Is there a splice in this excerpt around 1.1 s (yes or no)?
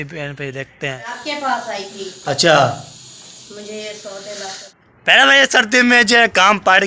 yes